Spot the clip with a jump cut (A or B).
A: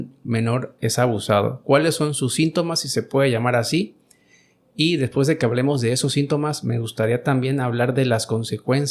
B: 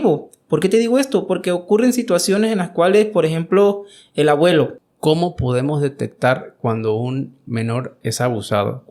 B